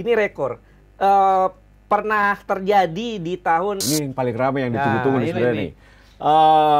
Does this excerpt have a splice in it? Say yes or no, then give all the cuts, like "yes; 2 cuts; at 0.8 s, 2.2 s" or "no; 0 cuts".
yes; 1 cut; at 3.8 s